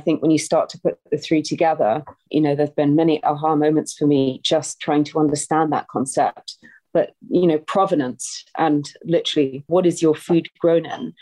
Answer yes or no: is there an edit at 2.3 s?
no